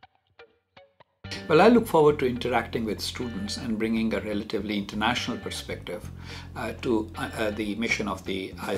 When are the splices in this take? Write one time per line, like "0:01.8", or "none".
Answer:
0:01.1